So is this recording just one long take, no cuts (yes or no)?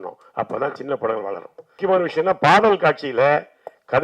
no